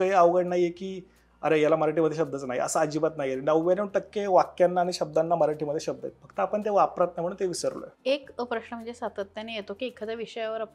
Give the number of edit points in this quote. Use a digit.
0